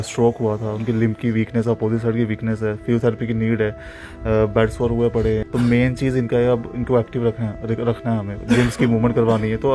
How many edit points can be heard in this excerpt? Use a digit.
1